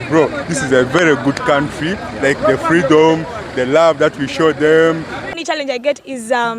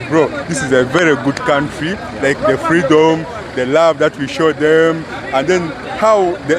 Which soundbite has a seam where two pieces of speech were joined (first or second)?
first